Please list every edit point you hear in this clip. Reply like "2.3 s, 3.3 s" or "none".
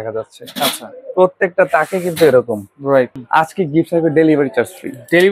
3.1 s